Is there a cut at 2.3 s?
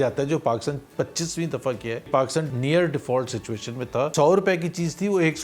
yes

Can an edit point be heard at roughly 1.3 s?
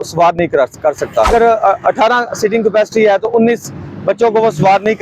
yes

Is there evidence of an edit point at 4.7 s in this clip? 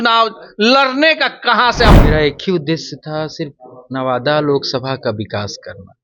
no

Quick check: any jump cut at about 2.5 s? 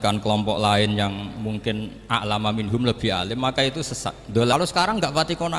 no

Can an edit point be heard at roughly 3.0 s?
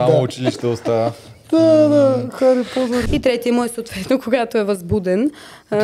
yes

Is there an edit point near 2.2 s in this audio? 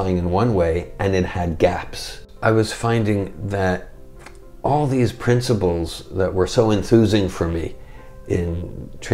yes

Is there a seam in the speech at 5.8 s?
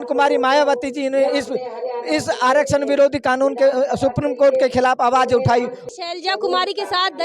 yes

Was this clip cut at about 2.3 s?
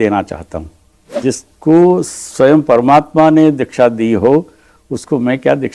no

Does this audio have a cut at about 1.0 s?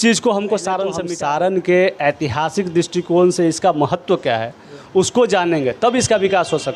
yes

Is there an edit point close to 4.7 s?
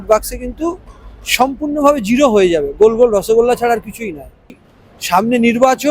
yes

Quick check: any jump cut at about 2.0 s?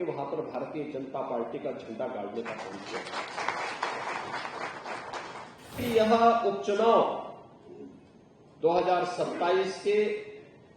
no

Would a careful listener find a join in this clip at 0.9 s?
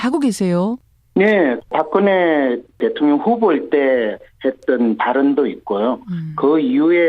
no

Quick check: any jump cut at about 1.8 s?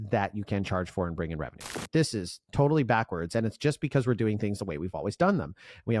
yes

